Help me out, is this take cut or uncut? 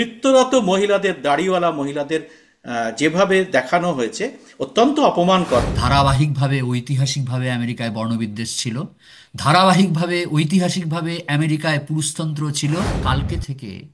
cut